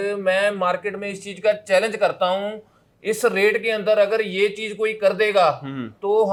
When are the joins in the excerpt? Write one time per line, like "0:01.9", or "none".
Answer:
none